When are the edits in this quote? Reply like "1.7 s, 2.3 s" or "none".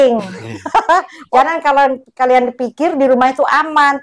1.2 s